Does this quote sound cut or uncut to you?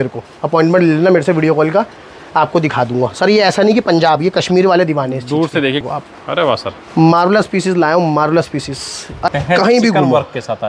cut